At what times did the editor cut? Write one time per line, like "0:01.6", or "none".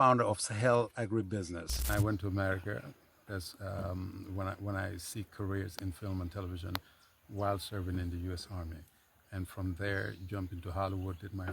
0:01.8

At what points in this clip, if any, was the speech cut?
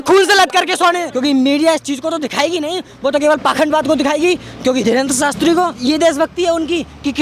0:01.1
0:05.8

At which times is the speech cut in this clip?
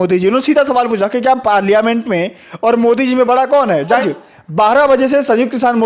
0:03.9

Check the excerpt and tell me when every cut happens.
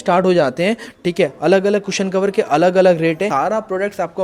0:03.3

